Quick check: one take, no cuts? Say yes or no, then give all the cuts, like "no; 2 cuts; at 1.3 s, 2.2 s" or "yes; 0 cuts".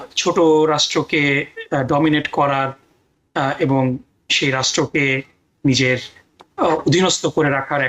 yes; 0 cuts